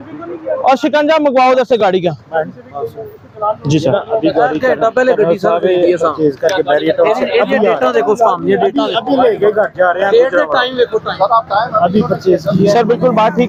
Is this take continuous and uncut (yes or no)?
yes